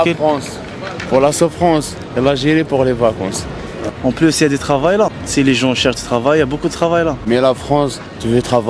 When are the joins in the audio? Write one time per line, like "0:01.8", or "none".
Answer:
0:03.7
0:05.2
0:07.2